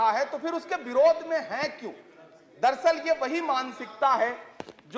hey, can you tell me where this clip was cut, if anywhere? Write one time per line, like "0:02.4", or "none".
none